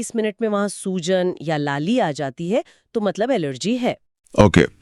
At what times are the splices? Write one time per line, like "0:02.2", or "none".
none